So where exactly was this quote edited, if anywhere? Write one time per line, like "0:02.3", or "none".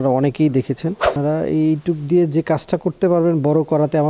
0:01.1